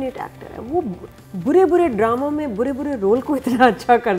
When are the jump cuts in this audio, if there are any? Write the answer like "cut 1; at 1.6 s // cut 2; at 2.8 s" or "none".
none